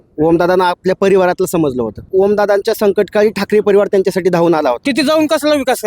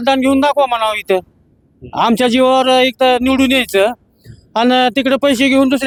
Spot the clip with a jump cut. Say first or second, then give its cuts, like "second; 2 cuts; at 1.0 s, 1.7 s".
first; 2 cuts; at 2.1 s, 4.8 s